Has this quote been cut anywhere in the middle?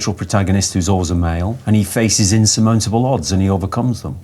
yes; 1 cut; at 1.5 s

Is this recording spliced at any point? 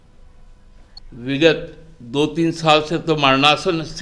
yes; 1 cut; at 1.0 s

